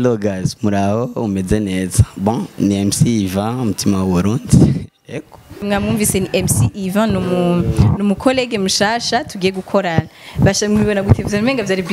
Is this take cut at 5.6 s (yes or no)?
yes